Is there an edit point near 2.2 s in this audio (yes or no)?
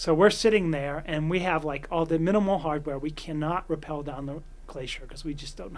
no